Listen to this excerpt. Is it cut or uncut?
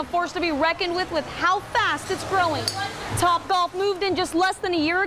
uncut